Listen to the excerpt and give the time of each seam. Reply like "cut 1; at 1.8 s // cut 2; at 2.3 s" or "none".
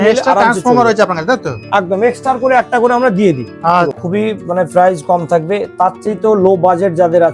cut 1; at 4.0 s

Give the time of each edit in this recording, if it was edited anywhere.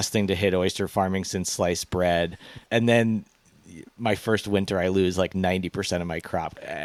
none

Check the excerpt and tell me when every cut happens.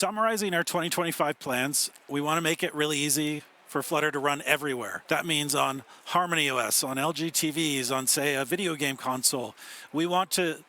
cut 1; at 2.1 s // cut 2; at 4.9 s

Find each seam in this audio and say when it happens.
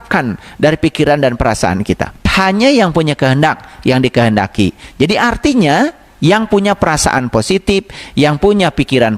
cut 1; at 2.3 s

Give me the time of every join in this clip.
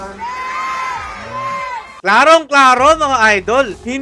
none

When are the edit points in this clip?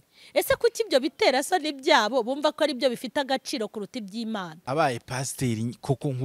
cut 1; at 4.7 s

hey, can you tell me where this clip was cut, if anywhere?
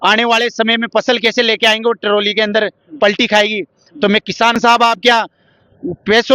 cut 1; at 4.6 s

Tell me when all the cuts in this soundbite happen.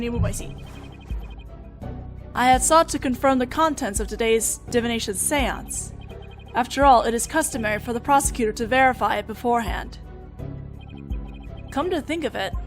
cut 1; at 11.7 s

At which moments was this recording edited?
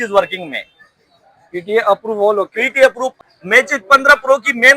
cut 1; at 3.1 s

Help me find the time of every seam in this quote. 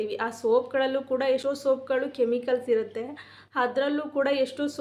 none

